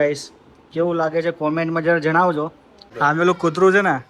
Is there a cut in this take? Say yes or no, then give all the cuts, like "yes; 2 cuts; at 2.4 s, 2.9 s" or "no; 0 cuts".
yes; 1 cut; at 2.8 s